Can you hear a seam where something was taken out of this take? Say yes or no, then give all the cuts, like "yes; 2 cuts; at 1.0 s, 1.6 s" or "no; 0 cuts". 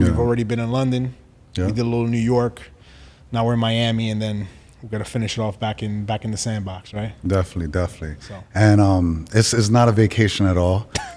no; 0 cuts